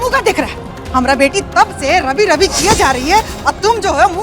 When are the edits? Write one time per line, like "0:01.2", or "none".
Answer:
none